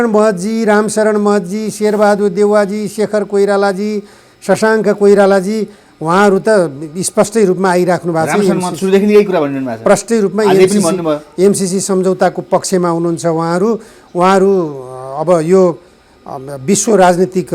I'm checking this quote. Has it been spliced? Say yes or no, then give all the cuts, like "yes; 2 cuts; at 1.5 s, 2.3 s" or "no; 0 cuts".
no; 0 cuts